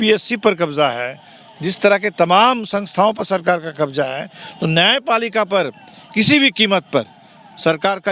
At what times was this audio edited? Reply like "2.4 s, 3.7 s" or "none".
none